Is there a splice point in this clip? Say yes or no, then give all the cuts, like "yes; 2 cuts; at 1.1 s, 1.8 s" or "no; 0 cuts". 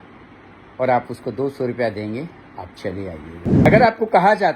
yes; 1 cut; at 3.7 s